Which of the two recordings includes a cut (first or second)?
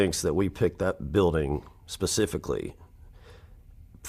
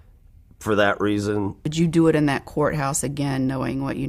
second